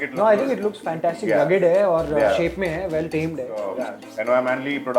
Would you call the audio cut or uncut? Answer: cut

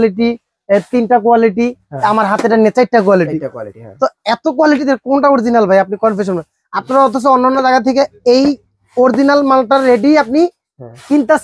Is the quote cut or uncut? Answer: uncut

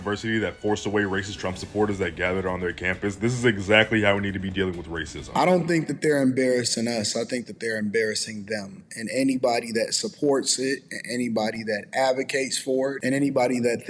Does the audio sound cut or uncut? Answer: cut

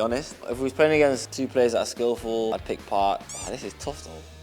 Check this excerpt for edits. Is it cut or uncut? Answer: cut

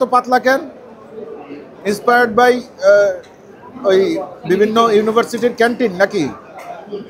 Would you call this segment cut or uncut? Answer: uncut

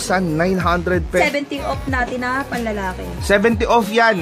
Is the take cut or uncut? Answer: cut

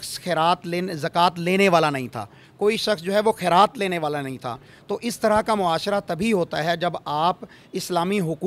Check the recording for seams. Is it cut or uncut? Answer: uncut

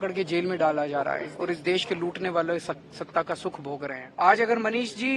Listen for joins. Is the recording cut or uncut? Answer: cut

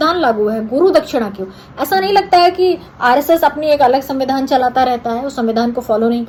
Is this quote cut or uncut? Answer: uncut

